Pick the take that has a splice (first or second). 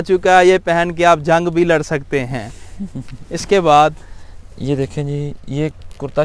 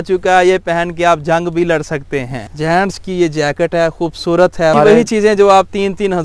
second